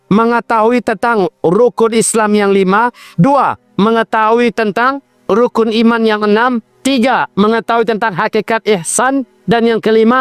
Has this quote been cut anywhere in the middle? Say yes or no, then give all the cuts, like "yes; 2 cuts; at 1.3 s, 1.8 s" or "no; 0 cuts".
no; 0 cuts